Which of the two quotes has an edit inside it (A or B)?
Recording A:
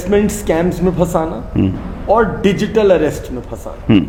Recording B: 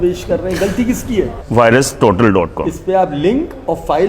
B